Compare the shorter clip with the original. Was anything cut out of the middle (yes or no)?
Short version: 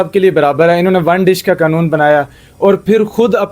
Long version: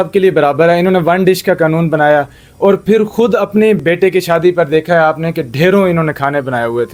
no